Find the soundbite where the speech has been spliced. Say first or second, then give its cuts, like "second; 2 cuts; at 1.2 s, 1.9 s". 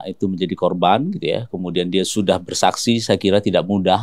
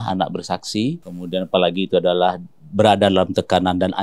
second; 1 cut; at 1.1 s